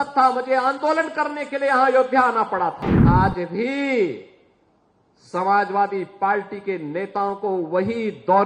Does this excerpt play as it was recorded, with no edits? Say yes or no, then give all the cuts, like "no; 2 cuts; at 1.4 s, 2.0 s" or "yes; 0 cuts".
no; 1 cut; at 2.9 s